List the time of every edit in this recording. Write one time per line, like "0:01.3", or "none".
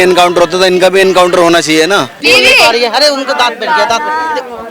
0:02.1